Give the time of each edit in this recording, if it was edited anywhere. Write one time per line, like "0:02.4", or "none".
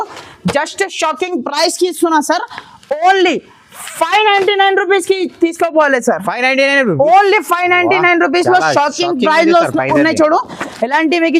none